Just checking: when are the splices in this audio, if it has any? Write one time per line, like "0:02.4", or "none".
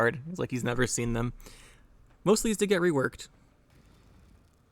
0:03.7